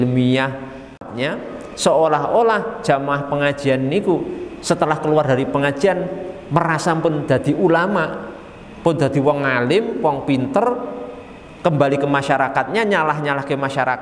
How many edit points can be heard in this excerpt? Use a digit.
1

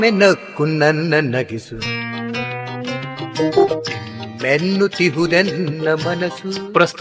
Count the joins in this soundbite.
1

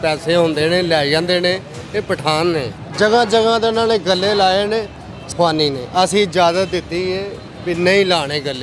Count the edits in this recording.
2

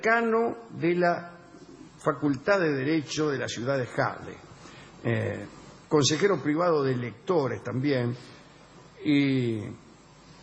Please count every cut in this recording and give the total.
1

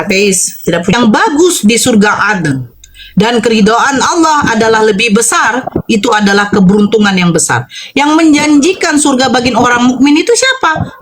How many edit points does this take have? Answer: 1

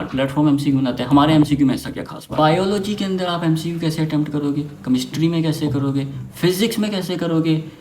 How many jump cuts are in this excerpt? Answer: 1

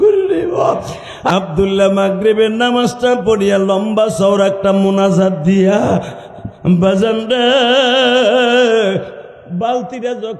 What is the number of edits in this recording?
1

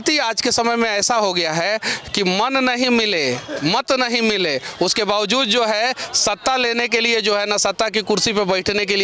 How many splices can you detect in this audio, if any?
0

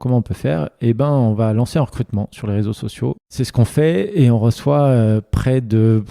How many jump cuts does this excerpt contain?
1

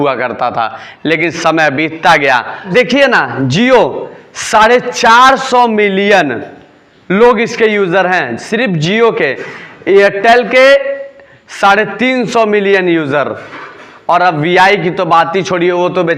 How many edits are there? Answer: 1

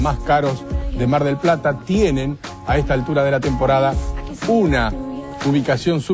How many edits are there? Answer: 0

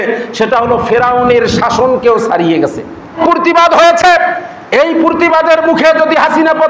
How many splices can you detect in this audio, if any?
1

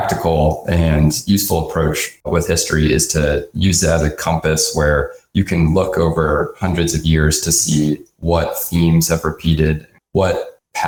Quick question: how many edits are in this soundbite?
0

